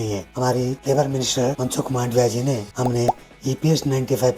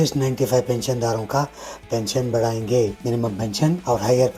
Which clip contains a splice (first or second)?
first